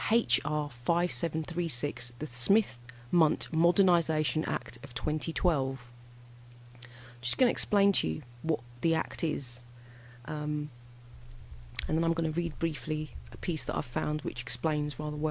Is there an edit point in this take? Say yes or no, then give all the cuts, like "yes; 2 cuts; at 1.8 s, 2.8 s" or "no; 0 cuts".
yes; 1 cut; at 8.0 s